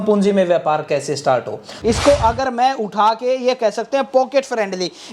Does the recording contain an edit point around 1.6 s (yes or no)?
yes